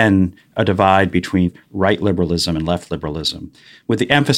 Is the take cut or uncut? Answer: cut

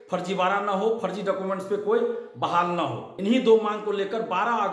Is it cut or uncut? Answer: cut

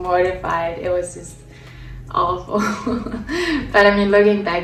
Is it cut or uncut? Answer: uncut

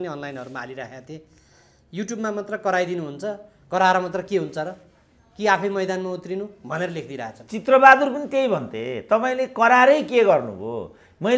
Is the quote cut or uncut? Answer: uncut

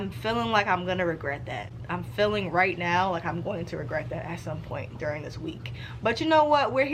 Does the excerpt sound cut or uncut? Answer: uncut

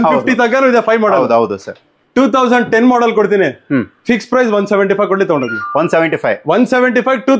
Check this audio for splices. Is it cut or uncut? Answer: uncut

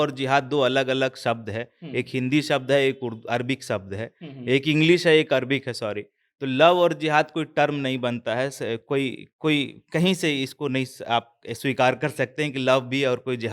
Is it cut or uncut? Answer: uncut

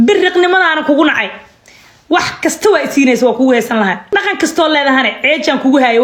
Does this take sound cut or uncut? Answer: uncut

